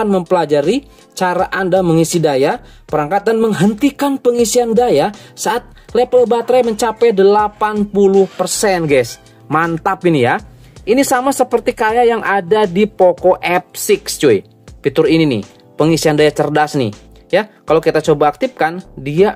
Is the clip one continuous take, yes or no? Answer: yes